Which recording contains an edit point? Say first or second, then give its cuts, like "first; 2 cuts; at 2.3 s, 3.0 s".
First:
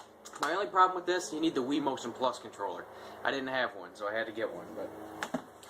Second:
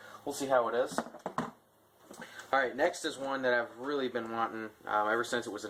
first; 1 cut; at 1.8 s